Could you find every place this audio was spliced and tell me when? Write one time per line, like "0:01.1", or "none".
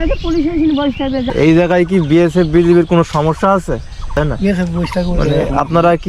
0:01.3
0:04.1